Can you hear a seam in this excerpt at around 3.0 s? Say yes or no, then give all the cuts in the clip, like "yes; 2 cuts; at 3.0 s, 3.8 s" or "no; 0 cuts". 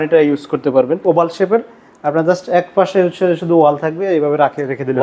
no; 1 cut; at 1.0 s